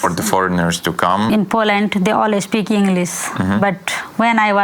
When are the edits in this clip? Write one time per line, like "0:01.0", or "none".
0:01.3